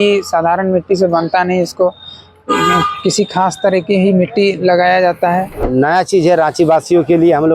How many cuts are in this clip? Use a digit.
1